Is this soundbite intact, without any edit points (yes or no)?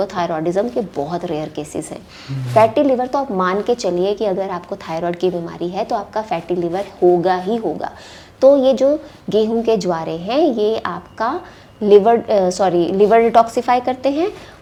yes